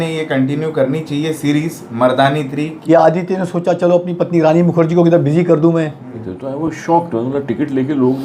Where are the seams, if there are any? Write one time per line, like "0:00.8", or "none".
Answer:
0:02.7
0:06.2